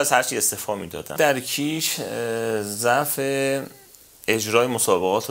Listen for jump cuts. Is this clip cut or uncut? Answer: cut